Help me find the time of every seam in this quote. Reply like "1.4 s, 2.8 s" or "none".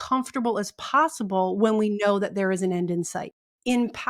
3.0 s